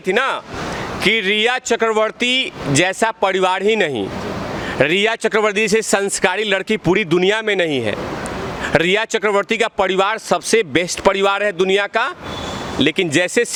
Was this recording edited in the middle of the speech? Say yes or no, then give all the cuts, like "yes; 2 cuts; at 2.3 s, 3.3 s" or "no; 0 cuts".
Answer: no; 0 cuts